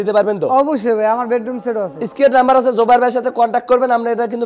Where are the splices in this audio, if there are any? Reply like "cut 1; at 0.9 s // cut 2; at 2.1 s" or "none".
none